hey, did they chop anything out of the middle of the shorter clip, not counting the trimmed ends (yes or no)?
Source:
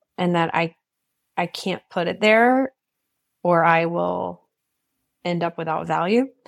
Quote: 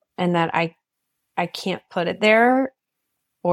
no